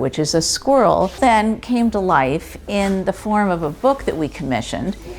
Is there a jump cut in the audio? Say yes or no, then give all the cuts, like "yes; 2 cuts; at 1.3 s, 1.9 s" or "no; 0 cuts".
yes; 1 cut; at 1.2 s